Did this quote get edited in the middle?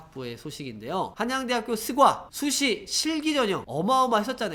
no; 0 cuts

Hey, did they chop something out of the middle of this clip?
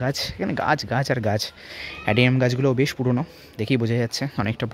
no; 0 cuts

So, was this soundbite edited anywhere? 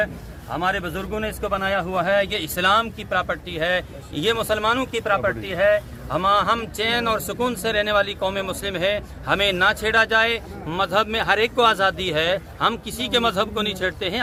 no; 0 cuts

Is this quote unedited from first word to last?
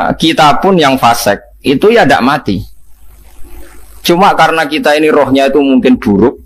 yes; 0 cuts

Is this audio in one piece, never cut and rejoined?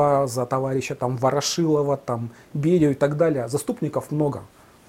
yes; 0 cuts

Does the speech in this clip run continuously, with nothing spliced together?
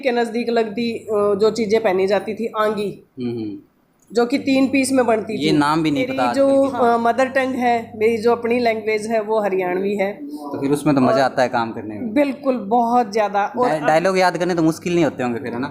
no; 1 cut; at 6.2 s

